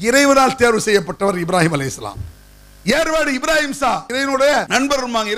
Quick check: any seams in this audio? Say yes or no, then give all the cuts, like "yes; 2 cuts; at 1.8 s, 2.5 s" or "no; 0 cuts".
no; 0 cuts